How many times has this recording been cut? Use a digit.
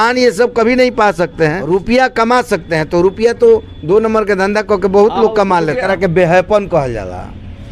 2